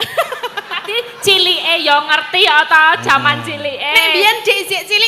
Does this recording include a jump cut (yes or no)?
no